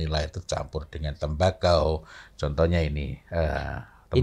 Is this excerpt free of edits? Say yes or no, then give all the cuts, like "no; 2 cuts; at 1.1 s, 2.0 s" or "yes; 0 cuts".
yes; 0 cuts